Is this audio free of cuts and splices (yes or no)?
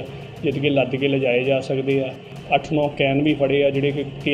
no